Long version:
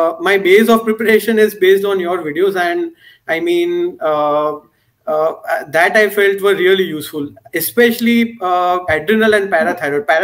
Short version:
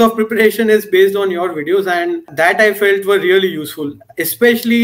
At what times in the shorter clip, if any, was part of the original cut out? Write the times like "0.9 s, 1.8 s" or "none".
2.3 s

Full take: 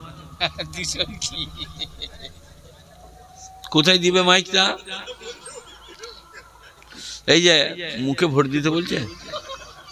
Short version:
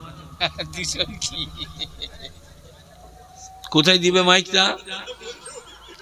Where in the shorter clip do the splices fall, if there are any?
none

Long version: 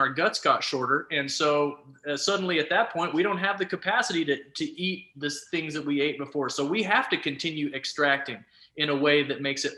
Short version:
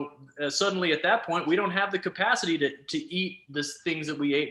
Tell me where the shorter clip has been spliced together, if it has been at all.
none

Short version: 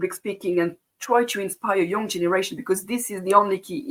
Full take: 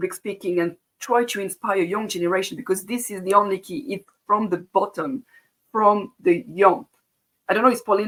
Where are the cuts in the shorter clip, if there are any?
none

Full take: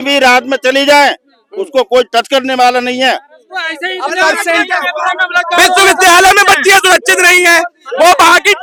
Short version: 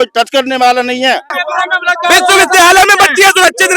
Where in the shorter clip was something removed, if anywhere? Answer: 1.3 s

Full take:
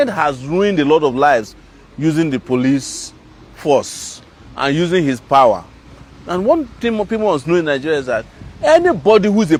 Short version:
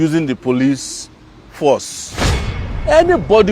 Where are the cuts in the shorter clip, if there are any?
2.5 s

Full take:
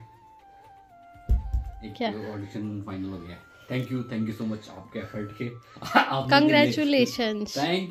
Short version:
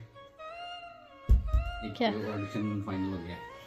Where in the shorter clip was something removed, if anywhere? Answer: none

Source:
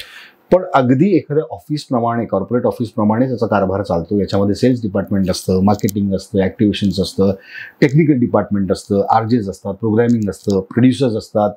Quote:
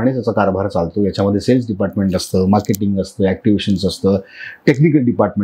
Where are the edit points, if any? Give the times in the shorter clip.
none

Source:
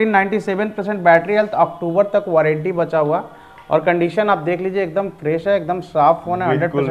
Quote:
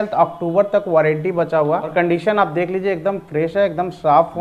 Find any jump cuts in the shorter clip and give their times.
1.9 s

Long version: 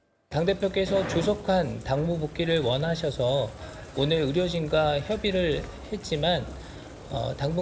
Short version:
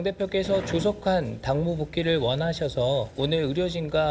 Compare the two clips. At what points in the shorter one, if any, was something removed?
3.1 s

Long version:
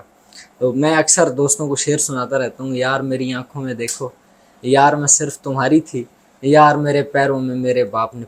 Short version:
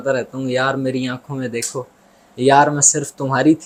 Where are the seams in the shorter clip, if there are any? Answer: none

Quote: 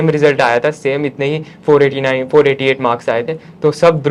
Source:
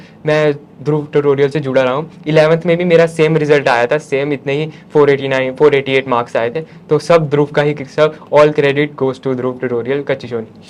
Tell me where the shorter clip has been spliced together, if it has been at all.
none

